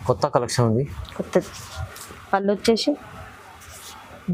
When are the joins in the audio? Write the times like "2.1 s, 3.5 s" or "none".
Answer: none